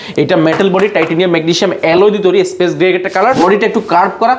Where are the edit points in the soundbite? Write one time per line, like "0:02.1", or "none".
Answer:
0:03.4